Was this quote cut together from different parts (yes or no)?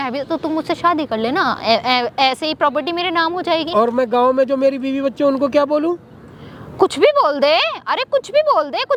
no